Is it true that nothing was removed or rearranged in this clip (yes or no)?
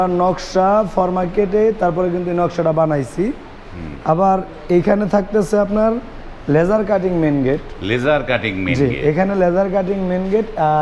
yes